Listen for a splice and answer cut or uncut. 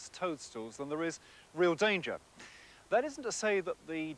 cut